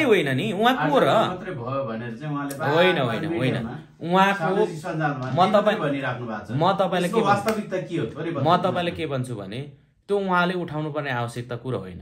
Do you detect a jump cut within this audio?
no; 0 cuts

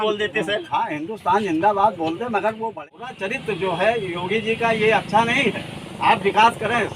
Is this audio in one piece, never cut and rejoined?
no; 1 cut; at 2.7 s

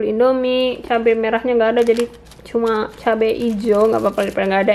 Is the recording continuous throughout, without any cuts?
yes; 0 cuts

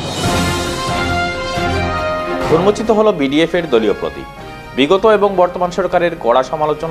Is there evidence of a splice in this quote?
yes; 1 cut; at 2.4 s

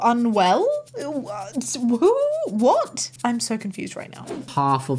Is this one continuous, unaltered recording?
no; 2 cuts; at 3.1 s, 4.3 s

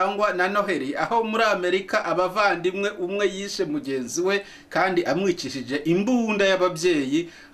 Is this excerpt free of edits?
yes; 0 cuts

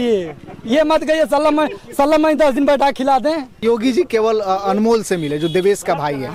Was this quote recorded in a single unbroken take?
no; 1 cut; at 3.6 s

